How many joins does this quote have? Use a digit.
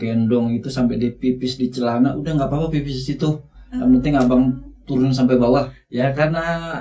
1